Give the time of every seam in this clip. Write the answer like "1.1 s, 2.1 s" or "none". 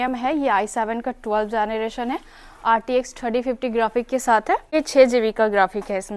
4.7 s